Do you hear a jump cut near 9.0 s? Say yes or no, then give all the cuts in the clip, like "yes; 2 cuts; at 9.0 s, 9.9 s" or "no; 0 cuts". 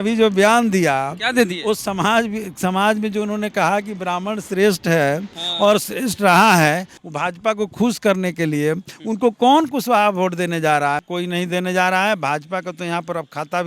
no; 2 cuts; at 6.9 s, 11.1 s